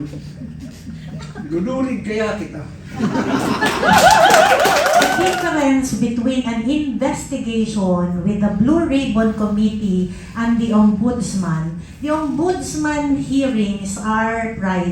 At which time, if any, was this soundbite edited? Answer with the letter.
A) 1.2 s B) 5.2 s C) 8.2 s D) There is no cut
B